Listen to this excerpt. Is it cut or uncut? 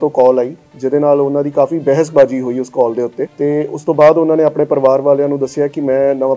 cut